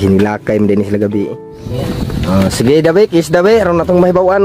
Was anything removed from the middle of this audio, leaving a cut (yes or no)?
yes